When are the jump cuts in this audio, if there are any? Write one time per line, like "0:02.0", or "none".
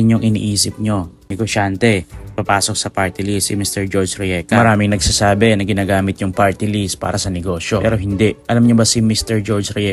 0:01.2
0:02.2

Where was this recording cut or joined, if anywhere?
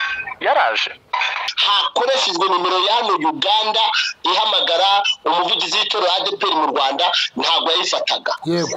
0:01.5

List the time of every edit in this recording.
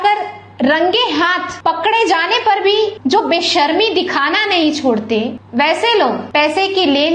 0:01.5
0:03.0
0:05.4
0:06.2

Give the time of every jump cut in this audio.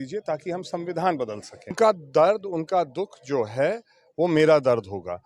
0:01.8

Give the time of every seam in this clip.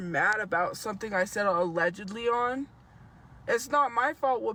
none

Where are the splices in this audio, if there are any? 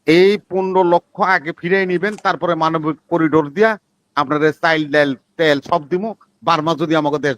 none

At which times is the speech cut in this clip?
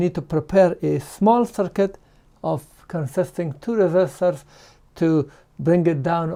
none

